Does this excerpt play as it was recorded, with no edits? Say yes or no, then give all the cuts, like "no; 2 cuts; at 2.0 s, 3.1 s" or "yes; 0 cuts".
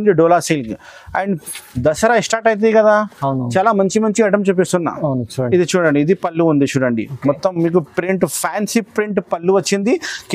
no; 1 cut; at 1.4 s